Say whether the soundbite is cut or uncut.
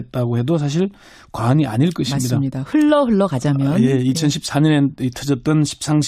uncut